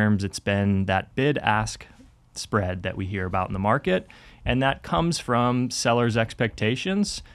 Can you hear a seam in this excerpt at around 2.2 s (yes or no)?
no